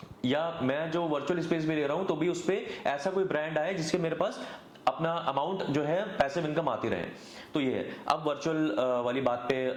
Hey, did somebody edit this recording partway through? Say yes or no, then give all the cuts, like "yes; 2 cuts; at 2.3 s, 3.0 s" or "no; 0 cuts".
no; 0 cuts